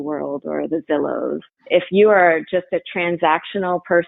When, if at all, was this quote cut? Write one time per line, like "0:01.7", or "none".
0:01.5